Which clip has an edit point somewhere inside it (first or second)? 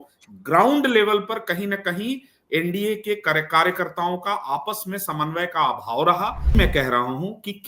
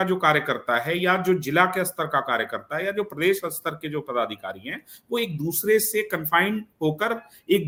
first